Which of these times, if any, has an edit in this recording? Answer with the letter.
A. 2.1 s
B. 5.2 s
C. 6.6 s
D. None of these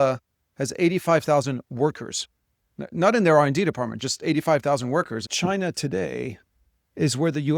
B